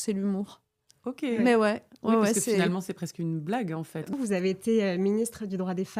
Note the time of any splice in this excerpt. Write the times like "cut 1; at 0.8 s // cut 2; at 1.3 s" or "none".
cut 1; at 4.1 s